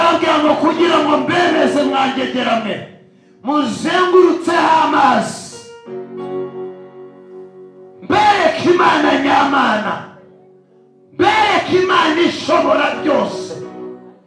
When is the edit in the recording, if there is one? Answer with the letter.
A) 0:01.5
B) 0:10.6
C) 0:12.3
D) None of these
D